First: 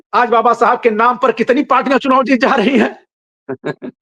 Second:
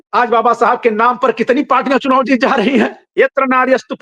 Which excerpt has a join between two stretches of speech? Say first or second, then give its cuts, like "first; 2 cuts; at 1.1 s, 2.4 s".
second; 1 cut; at 3.0 s